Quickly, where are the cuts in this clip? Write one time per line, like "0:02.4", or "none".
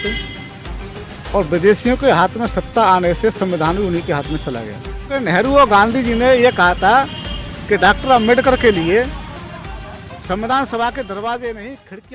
0:05.1